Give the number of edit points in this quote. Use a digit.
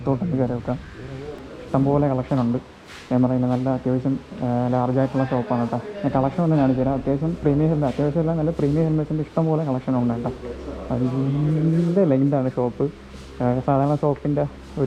0